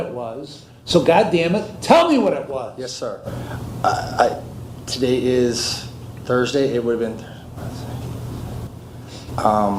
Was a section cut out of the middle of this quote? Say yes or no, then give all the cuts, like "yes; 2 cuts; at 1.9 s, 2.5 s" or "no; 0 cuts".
no; 0 cuts